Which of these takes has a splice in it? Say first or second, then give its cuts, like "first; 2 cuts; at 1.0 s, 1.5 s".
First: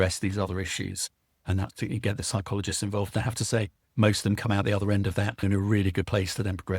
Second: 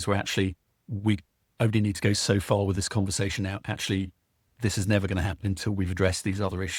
first; 1 cut; at 5.4 s